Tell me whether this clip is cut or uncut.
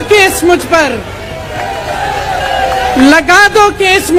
uncut